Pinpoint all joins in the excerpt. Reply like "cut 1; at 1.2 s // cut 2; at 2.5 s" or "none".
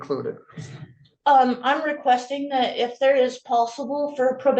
cut 1; at 1.2 s